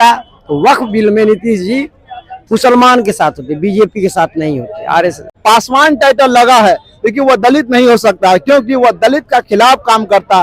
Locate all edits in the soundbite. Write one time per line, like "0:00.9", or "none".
0:05.2